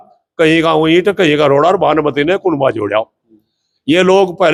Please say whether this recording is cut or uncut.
uncut